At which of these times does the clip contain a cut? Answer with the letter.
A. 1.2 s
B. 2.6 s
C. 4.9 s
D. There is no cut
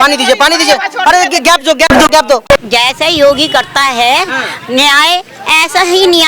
B